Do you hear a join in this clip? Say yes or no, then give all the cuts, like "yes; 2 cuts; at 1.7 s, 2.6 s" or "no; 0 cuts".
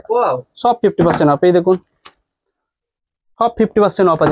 no; 0 cuts